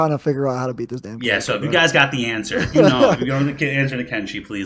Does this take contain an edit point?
no; 0 cuts

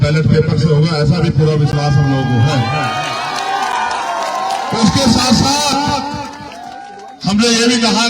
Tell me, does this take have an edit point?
no; 0 cuts

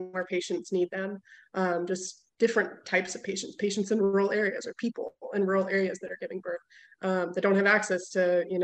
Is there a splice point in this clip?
no; 0 cuts

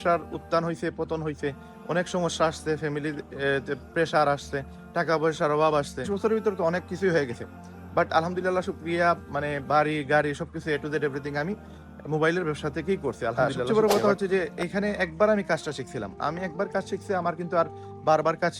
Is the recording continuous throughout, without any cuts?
no; 2 cuts; at 6.1 s, 13.3 s

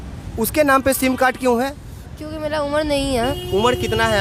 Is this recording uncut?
yes; 0 cuts

